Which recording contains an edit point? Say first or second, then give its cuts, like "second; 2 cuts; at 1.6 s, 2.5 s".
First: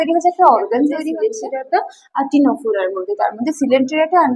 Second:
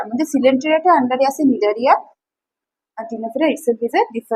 first; 1 cut; at 1.2 s